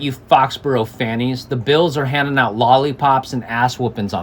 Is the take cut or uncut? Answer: uncut